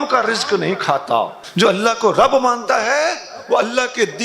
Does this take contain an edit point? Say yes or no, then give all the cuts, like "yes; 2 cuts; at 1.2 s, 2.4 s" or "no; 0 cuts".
yes; 1 cut; at 1.4 s